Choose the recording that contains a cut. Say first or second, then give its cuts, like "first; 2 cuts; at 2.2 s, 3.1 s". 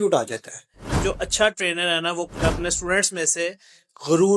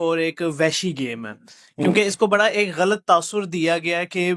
first; 1 cut; at 1.0 s